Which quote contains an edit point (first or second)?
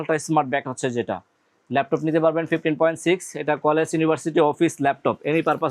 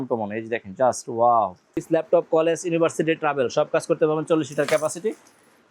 second